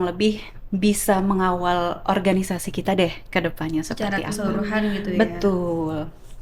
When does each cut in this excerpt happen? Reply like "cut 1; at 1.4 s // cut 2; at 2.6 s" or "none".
none